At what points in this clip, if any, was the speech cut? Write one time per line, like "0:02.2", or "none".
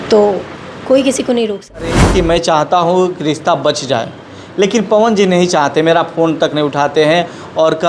0:02.0